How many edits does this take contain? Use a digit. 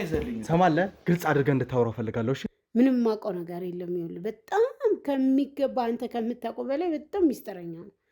1